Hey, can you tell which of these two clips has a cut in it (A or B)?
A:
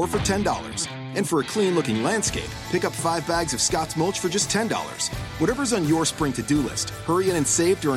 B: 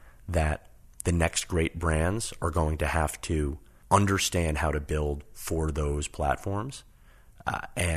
B